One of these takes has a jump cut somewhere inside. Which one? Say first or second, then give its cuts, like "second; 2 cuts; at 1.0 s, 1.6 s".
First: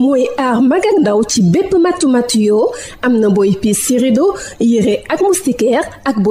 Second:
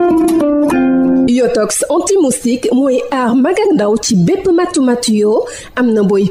second; 1 cut; at 1.2 s